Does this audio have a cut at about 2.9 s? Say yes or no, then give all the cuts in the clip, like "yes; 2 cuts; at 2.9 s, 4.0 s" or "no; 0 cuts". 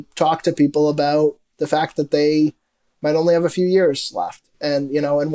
no; 0 cuts